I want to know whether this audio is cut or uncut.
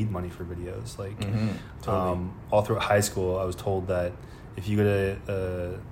uncut